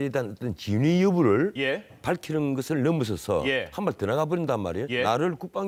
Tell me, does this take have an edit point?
no; 0 cuts

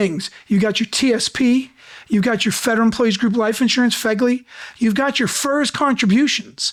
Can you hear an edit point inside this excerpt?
no; 0 cuts

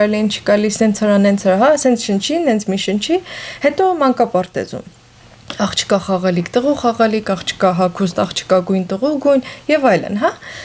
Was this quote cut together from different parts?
no; 0 cuts

